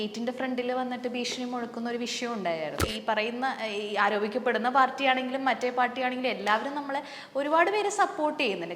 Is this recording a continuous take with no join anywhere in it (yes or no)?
no